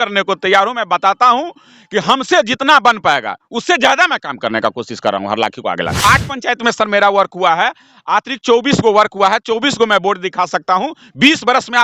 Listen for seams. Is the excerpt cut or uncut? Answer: cut